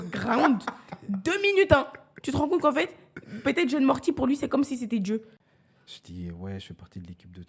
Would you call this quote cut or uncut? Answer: cut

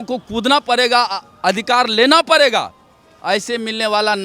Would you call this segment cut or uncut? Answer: uncut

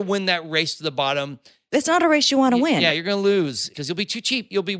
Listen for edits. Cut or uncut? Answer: uncut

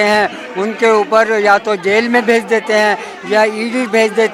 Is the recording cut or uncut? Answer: uncut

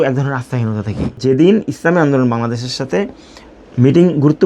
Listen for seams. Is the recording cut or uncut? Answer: cut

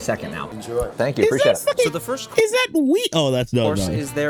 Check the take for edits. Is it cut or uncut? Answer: uncut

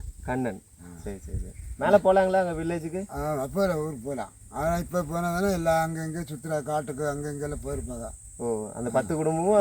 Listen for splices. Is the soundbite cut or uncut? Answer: uncut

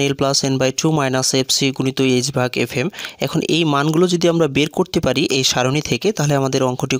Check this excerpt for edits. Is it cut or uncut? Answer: uncut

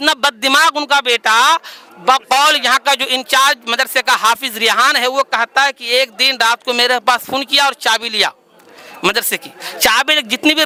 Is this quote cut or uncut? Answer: uncut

